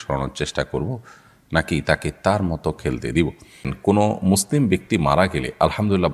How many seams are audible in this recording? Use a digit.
1